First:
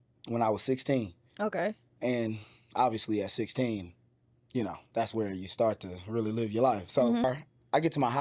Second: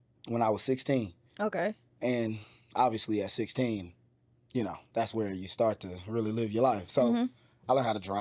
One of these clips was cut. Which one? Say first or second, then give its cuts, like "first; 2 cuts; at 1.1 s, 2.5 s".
first; 1 cut; at 7.2 s